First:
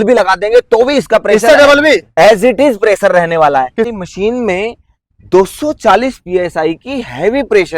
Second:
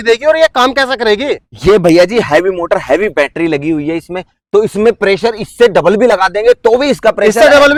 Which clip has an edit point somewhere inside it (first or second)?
first